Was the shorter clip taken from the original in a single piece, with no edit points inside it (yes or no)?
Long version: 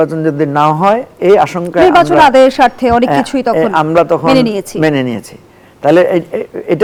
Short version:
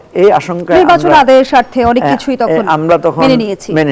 yes